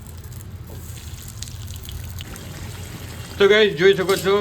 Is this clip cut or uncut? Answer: cut